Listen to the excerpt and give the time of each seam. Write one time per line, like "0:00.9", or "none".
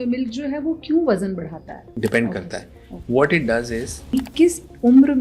0:01.9
0:04.0